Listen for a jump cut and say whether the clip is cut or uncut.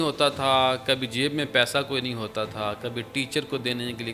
uncut